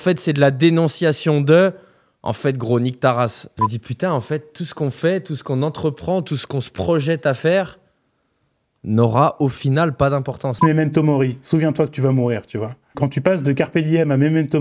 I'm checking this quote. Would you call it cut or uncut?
cut